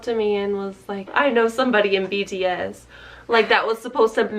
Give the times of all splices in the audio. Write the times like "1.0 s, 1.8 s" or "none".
0.9 s